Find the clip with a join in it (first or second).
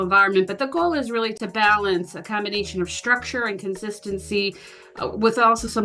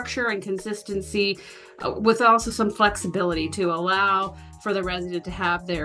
first